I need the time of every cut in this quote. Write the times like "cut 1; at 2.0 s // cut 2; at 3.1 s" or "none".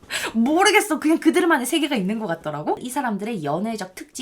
cut 1; at 2.9 s